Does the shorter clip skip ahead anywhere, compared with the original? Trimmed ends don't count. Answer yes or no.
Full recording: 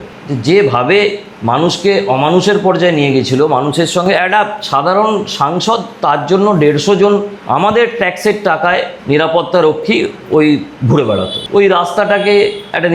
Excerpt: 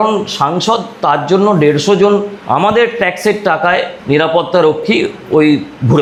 no